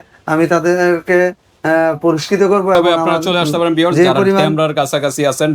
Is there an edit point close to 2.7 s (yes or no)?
no